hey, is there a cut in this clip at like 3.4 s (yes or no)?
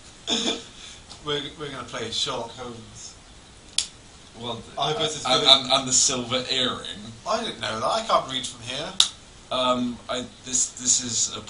no